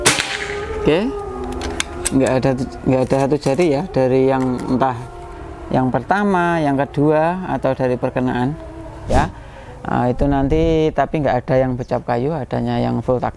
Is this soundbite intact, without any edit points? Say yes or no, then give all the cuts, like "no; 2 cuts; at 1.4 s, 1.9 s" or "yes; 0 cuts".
no; 1 cut; at 9.2 s